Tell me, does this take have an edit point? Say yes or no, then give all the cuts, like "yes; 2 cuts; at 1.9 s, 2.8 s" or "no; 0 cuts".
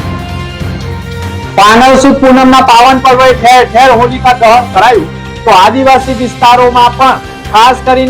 yes; 1 cut; at 1.4 s